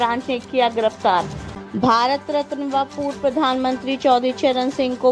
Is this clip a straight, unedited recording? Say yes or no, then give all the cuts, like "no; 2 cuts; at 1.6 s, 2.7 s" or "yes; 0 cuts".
no; 1 cut; at 1.4 s